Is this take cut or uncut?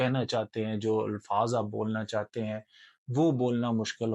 uncut